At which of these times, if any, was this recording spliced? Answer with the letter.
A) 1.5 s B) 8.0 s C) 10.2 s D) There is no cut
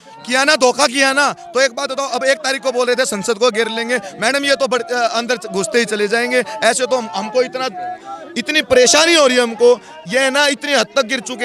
D